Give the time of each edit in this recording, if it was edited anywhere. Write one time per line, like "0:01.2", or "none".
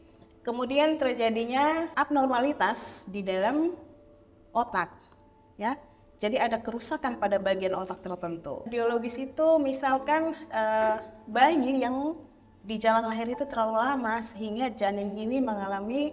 0:01.9
0:08.7